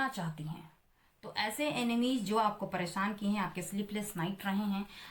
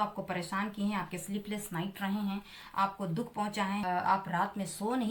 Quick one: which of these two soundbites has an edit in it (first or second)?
second